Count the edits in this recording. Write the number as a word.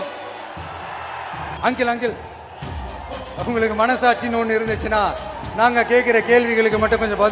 one